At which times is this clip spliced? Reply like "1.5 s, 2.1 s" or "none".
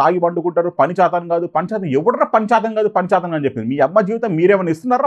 none